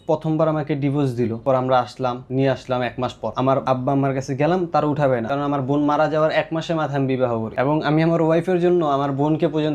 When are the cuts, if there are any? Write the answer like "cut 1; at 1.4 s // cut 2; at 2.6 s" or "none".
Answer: cut 1; at 1.4 s // cut 2; at 2.2 s // cut 3; at 3.6 s // cut 4; at 5.3 s // cut 5; at 7.5 s